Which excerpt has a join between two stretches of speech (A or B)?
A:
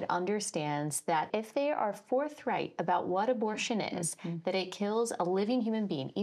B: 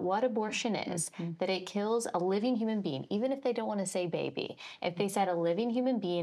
A